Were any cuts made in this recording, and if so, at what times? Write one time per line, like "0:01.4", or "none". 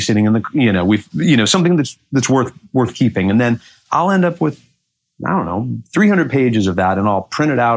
none